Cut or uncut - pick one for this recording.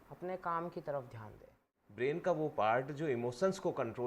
cut